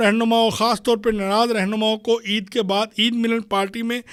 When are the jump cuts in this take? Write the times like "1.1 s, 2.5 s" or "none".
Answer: none